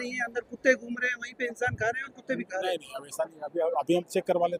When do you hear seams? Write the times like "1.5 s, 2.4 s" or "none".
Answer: none